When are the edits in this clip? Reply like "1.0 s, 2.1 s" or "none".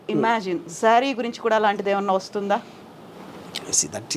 none